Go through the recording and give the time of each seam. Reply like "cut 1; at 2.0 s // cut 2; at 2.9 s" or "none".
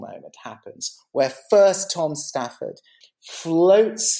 cut 1; at 2.9 s